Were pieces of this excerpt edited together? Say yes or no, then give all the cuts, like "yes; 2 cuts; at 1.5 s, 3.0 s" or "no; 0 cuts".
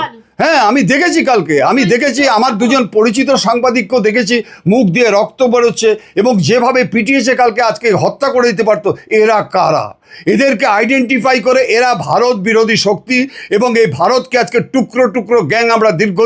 no; 0 cuts